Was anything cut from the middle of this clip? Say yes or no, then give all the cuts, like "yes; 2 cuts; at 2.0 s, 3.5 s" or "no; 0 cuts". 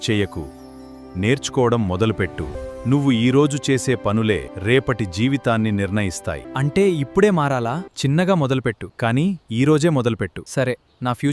yes; 6 cuts; at 2.6 s, 4.5 s, 6.5 s, 7.9 s, 8.9 s, 10.4 s